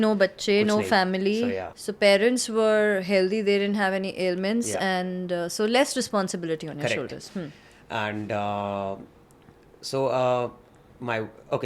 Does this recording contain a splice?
no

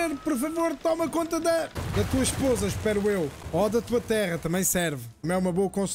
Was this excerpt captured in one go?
no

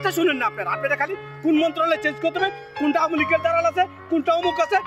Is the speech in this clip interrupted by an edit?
no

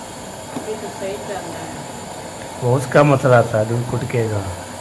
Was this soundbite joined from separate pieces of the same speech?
no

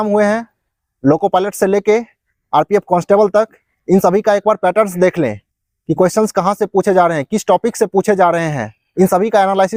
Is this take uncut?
yes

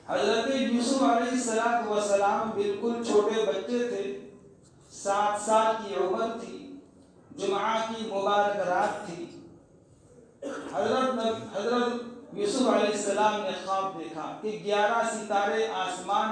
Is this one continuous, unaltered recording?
yes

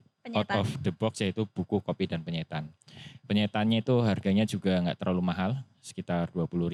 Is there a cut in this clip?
no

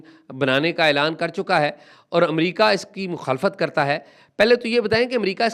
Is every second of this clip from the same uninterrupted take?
yes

